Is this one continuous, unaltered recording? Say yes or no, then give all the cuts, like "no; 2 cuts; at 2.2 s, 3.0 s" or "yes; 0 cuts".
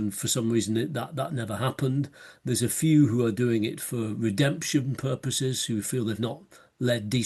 yes; 0 cuts